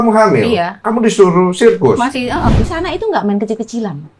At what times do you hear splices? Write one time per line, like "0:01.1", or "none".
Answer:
0:02.5

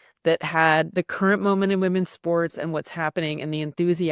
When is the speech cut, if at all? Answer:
none

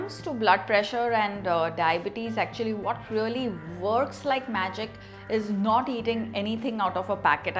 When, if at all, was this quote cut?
none

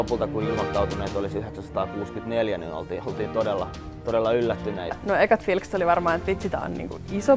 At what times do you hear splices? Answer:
0:05.0

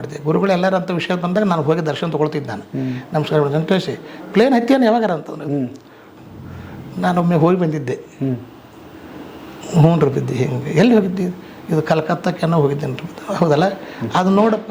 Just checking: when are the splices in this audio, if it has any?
none

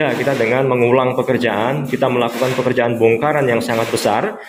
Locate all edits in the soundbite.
none

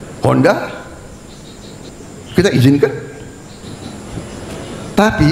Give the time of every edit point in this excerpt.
0:01.9
0:03.6

